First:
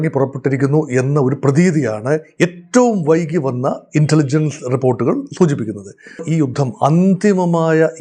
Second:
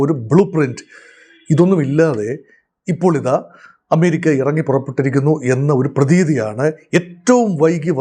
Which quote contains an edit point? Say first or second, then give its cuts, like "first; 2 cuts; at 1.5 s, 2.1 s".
first; 1 cut; at 6.2 s